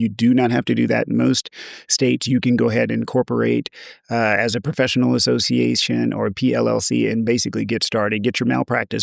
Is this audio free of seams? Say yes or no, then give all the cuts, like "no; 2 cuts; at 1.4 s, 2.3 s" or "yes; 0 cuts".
yes; 0 cuts